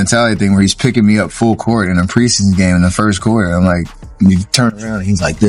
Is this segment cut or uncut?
uncut